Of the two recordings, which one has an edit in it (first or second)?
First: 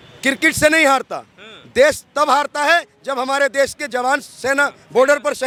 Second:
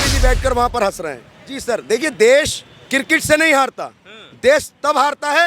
second